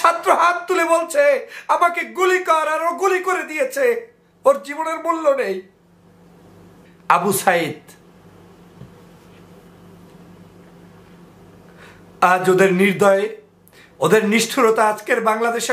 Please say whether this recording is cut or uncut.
cut